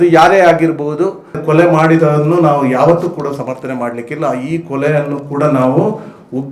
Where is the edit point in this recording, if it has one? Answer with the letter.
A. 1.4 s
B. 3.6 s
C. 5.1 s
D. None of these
A